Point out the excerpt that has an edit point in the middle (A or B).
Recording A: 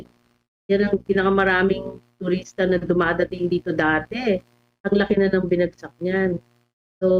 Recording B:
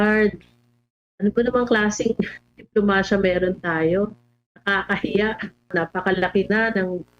B